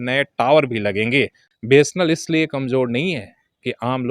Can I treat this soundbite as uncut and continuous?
no; 1 cut; at 1.5 s

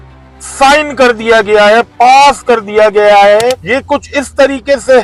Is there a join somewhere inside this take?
no; 0 cuts

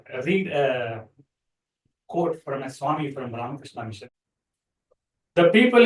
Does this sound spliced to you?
yes; 1 cut; at 4.0 s

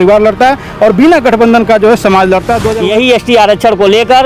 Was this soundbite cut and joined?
yes; 1 cut; at 2.6 s

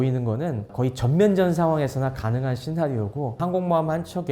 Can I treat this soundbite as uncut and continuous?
no; 1 cut; at 3.4 s

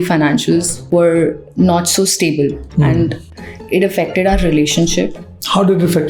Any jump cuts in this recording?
no; 0 cuts

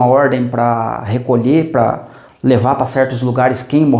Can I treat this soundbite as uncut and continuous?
yes; 0 cuts

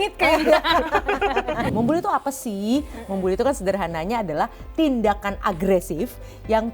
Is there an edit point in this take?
yes; 1 cut; at 1.7 s

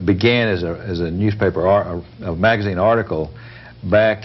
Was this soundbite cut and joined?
yes; 1 cut; at 3.3 s

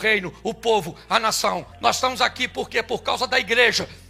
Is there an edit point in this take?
no; 0 cuts

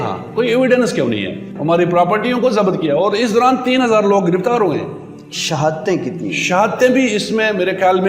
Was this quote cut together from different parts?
yes; 1 cut; at 1.5 s

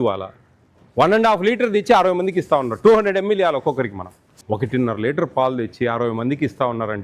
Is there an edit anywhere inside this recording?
yes; 1 cut; at 4.2 s

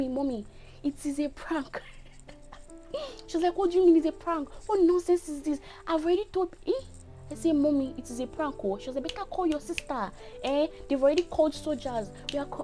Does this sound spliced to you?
no; 0 cuts

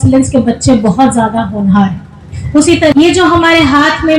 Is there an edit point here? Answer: yes; 1 cut; at 2.9 s

